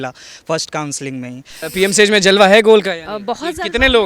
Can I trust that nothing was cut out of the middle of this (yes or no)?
no